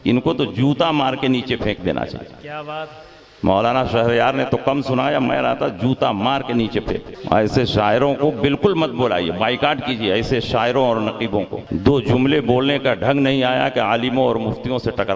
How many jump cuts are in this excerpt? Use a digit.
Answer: 2